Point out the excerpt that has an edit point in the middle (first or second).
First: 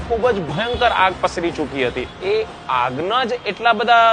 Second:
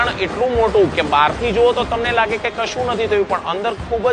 first